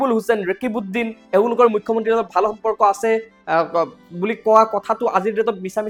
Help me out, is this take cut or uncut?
uncut